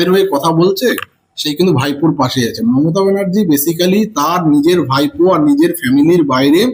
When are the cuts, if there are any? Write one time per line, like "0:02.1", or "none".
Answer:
none